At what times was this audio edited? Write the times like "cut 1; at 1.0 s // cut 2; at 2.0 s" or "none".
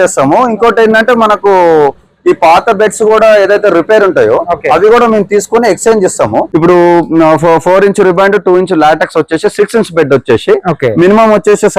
cut 1; at 6.5 s